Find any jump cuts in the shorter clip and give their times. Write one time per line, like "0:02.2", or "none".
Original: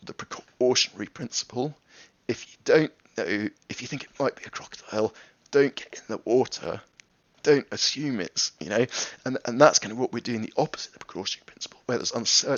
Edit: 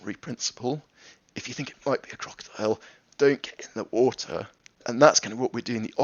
0:01.2
0:04.8